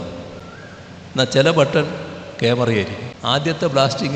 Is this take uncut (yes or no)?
no